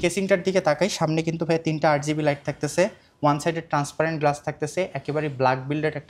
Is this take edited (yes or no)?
no